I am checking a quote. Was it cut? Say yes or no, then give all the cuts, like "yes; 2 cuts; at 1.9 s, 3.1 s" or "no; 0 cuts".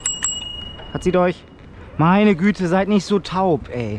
no; 0 cuts